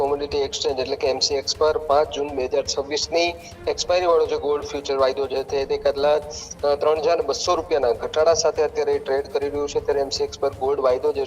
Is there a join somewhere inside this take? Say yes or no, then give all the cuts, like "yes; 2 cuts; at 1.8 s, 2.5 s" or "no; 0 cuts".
no; 0 cuts